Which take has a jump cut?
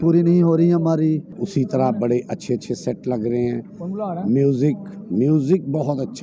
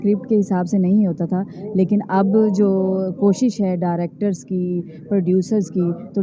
first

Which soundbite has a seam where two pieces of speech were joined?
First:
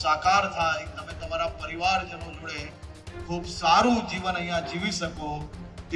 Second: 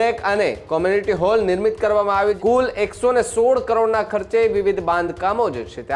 second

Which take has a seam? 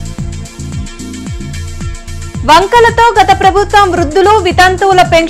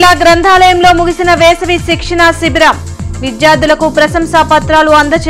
first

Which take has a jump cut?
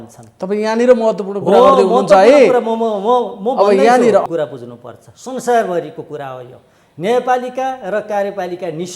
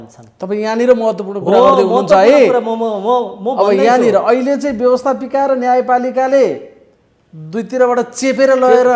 first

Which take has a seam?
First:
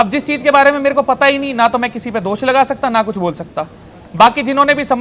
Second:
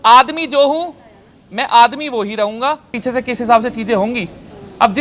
second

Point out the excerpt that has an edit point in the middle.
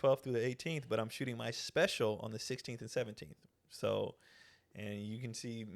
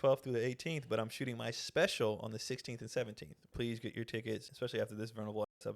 second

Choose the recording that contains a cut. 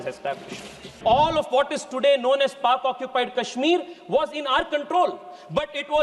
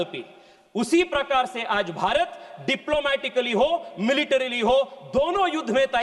first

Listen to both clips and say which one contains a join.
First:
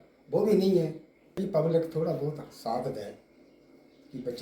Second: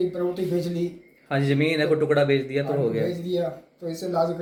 first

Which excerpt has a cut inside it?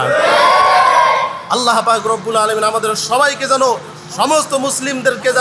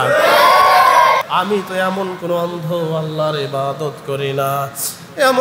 second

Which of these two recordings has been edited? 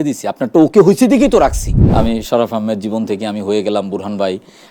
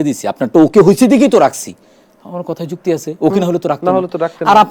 first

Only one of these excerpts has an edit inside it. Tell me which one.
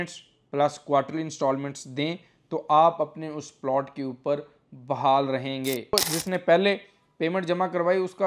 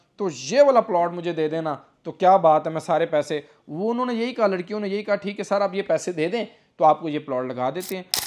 first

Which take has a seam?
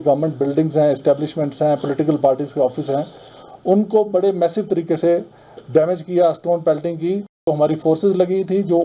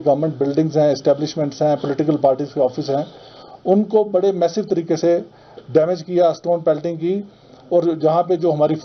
first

